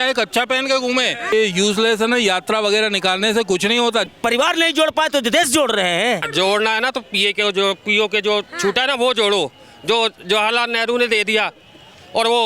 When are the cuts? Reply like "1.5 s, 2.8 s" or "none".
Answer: 1.3 s, 4.1 s, 6.3 s